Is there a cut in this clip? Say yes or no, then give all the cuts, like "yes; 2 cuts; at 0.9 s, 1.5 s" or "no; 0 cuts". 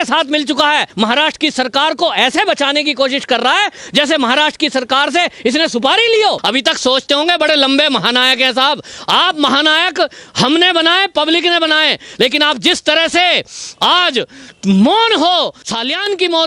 yes; 2 cuts; at 0.9 s, 6.4 s